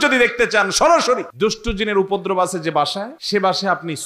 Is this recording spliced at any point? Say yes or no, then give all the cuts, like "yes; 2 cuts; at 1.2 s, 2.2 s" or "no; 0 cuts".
yes; 2 cuts; at 1.3 s, 3.2 s